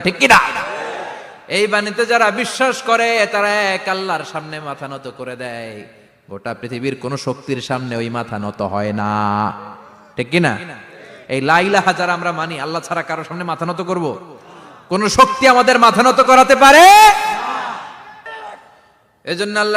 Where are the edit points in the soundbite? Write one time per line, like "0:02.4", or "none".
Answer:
none

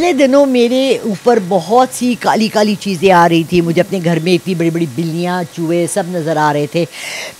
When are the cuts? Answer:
none

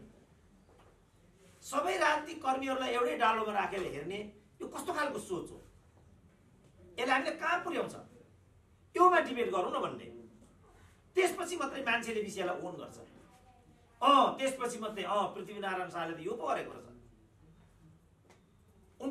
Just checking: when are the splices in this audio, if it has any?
none

